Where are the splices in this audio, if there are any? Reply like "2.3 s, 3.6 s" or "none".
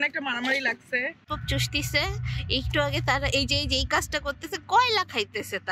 1.2 s